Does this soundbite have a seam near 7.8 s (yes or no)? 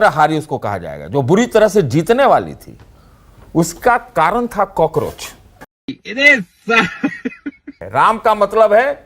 yes